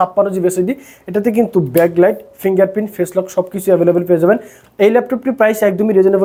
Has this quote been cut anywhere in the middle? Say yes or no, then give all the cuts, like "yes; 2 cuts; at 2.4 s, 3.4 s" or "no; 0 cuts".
no; 0 cuts